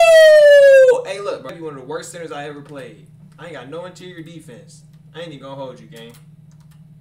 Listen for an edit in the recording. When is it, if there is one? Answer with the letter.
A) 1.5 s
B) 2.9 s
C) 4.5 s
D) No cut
A